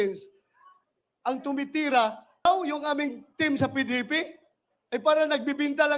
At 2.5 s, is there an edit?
yes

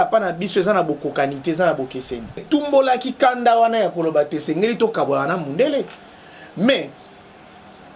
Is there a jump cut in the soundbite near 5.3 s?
no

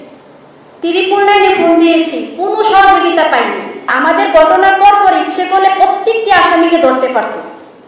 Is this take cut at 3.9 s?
yes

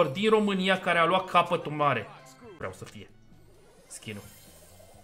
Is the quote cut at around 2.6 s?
yes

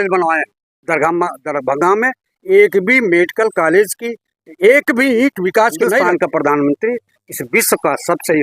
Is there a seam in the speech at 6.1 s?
yes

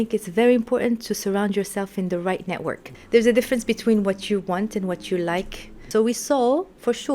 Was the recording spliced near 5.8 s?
yes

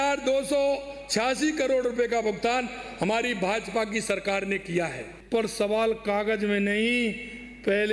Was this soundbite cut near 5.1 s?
yes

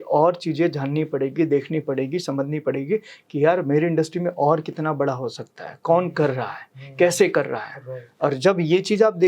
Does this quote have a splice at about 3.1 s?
no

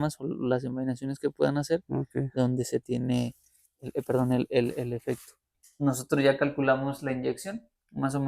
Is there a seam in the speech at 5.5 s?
yes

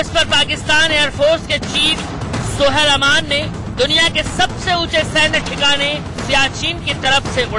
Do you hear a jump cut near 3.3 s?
no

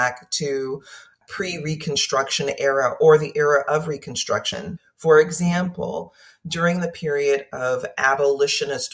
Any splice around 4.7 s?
yes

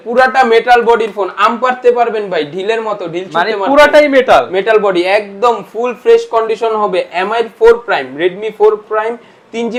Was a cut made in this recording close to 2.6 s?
no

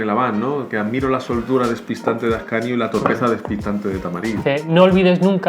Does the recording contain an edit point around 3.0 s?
no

